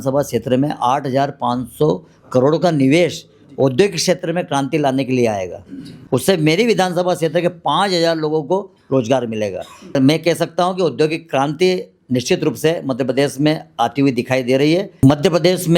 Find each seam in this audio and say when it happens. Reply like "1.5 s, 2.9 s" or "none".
5.9 s, 9.9 s, 15.0 s